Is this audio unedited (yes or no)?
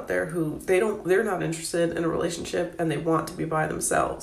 yes